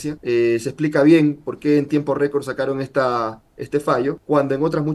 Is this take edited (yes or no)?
no